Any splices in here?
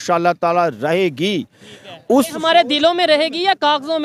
no; 0 cuts

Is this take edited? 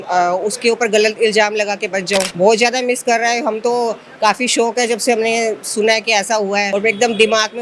yes; 2 cuts; at 2.3 s, 6.7 s

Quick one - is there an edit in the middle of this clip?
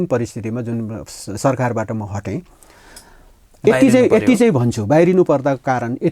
no; 0 cuts

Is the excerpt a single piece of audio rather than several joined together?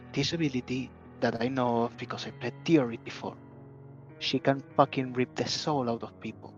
yes; 0 cuts

